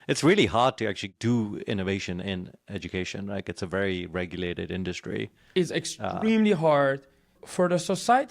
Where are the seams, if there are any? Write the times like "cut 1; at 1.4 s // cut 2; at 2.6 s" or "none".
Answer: cut 1; at 1.0 s // cut 2; at 7.4 s